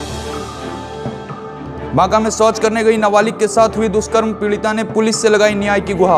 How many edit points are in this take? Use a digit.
1